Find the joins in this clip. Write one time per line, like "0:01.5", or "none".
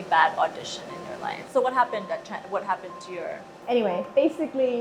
0:01.3